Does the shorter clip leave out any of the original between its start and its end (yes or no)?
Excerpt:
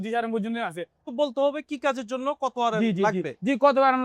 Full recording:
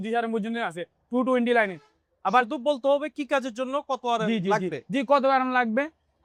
yes